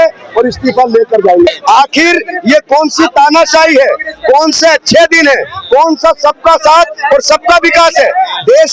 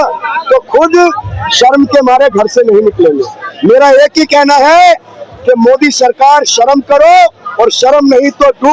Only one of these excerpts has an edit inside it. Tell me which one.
first; 1 cut; at 1.5 s

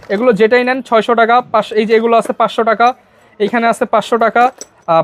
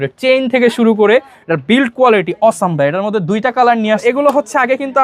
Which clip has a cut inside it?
second; 1 cut; at 4.0 s

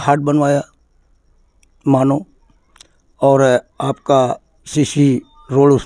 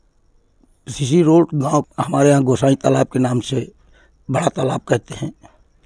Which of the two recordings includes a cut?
second; 1 cut; at 1.9 s

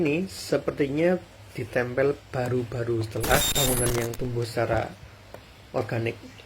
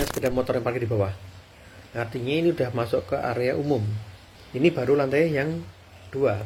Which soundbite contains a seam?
first; 1 cut; at 3.5 s

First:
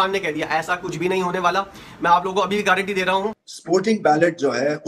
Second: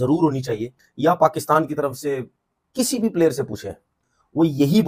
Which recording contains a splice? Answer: first; 1 cut; at 3.4 s

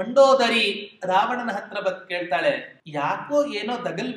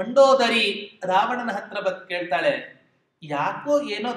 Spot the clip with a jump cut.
first; 1 cut; at 2.8 s

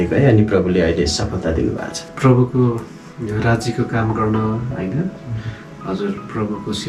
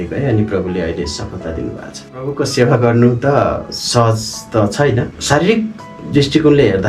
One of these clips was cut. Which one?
second; 1 cut; at 2.2 s

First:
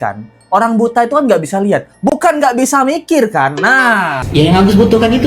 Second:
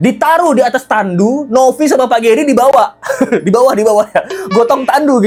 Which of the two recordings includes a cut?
first; 1 cut; at 4.2 s

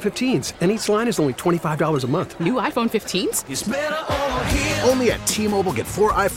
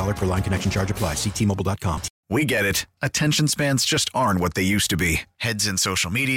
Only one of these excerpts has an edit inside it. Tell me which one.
second; 1 cut; at 2.1 s

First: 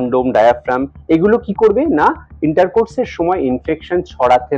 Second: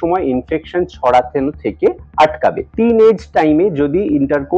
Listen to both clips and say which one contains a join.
second; 1 cut; at 2.6 s

